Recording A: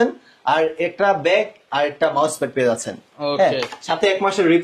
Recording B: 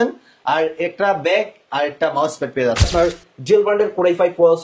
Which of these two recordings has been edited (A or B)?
B